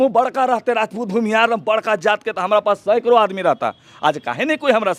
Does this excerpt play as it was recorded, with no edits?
yes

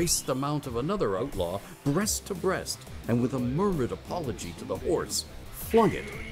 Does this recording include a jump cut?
yes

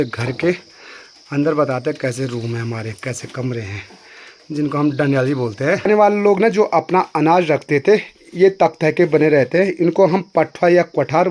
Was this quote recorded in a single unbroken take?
no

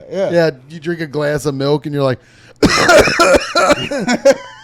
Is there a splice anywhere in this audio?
no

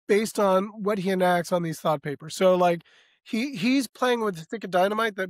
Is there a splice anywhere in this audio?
no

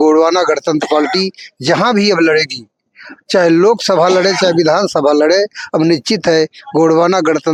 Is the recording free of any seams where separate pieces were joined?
yes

